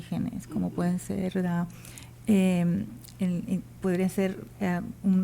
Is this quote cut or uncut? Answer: uncut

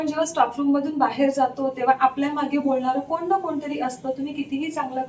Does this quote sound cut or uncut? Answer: uncut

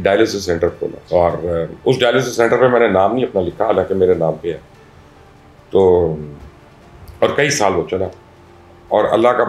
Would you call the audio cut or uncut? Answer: uncut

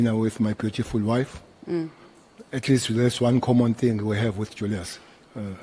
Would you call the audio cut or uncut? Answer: uncut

